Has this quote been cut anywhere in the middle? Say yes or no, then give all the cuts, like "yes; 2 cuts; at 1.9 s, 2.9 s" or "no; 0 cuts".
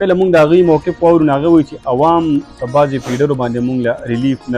no; 0 cuts